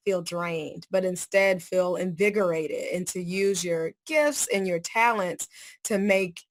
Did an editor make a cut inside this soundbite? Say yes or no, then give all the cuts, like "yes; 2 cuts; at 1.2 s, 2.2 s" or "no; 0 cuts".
no; 0 cuts